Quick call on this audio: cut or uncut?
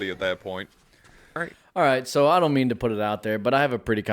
cut